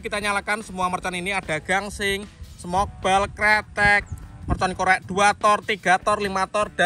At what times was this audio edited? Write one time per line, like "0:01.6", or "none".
none